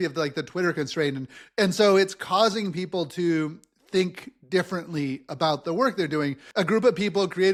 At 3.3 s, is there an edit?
no; 0 cuts

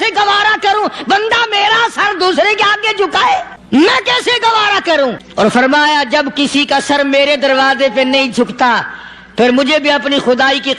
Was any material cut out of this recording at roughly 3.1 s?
yes; 2 cuts; at 3.1 s, 5.2 s

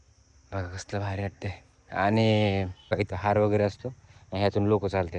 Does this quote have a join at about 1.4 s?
no; 1 cut; at 3.0 s

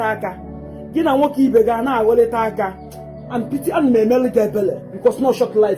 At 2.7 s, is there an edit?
no; 1 cut; at 4.9 s

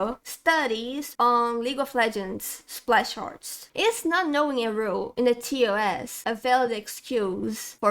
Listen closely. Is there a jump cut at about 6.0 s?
no; 1 cut; at 3.6 s

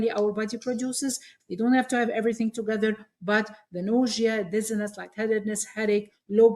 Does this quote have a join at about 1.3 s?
yes; 1 cut; at 1.3 s

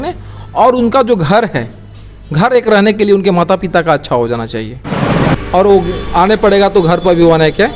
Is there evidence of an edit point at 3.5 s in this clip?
no; 1 cut; at 5.2 s

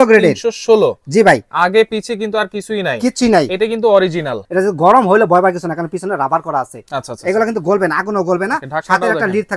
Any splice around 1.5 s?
no; 1 cut; at 4.4 s

